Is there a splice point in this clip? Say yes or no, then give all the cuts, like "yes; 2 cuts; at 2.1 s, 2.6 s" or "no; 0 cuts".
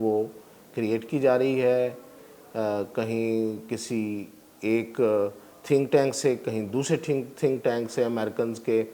no; 0 cuts